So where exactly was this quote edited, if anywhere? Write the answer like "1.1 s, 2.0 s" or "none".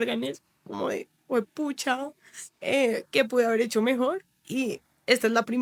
none